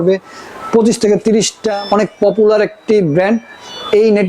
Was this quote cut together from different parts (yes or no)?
yes